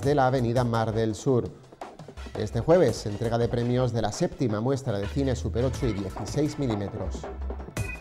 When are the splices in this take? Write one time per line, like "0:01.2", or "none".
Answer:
0:07.1